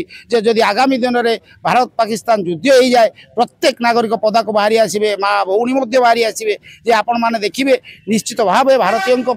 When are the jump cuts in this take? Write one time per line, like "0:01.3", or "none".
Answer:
none